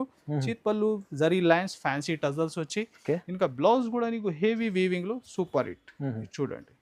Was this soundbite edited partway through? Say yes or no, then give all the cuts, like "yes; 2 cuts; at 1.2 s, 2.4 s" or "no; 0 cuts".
no; 0 cuts